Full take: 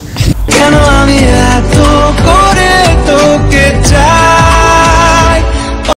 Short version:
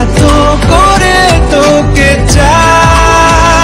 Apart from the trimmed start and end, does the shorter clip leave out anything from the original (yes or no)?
no